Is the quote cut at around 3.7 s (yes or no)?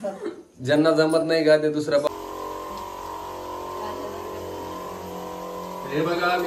no